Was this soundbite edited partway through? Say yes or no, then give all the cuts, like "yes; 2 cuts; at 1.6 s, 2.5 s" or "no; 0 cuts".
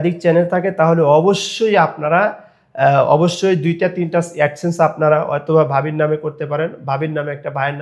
no; 0 cuts